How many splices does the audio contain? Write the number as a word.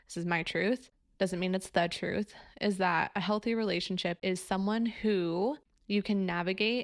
three